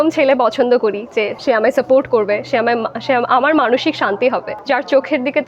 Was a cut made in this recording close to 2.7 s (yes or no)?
no